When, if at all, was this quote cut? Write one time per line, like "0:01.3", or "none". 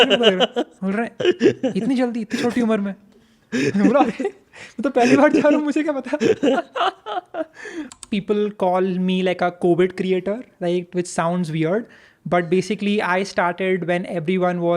0:08.0